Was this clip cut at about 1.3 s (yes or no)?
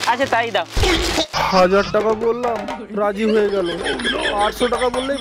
yes